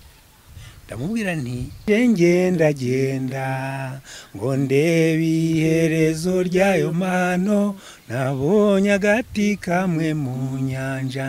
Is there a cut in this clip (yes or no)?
yes